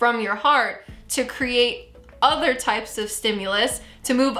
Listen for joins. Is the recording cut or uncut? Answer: uncut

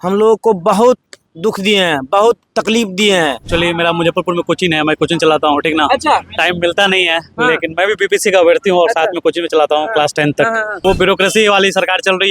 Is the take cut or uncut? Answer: cut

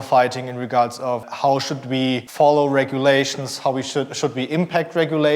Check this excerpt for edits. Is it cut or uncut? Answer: cut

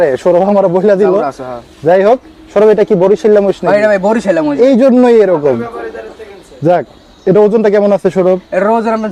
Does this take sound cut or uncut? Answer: uncut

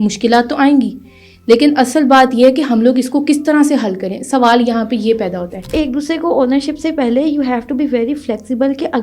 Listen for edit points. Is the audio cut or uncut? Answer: cut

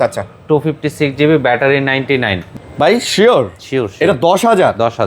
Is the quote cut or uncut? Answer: cut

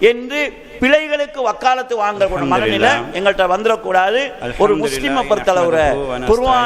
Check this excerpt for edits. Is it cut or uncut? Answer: uncut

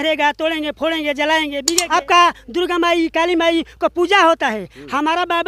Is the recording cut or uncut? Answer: cut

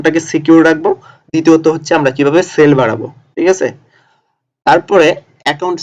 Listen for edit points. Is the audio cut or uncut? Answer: uncut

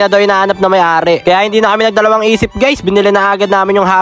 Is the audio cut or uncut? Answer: cut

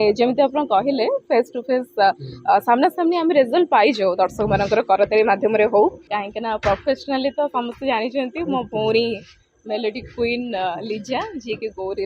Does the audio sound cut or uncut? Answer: cut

